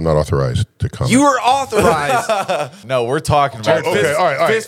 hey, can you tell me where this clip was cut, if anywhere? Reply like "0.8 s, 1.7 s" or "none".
2.8 s